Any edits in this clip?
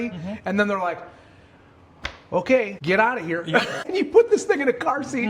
yes; 2 cuts; at 2.8 s, 3.8 s

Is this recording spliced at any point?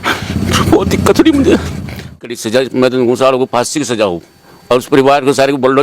yes; 1 cut; at 2.4 s

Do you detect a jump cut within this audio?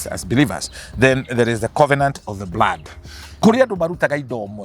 yes; 1 cut; at 3.2 s

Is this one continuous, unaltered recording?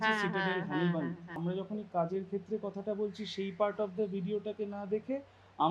no; 1 cut; at 1.4 s

